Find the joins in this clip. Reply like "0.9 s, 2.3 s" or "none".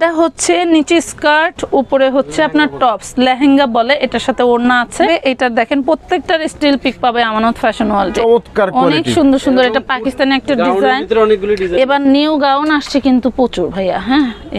5.1 s, 8.1 s